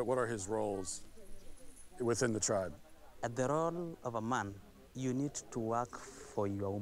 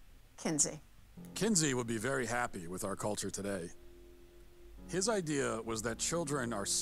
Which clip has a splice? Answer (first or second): second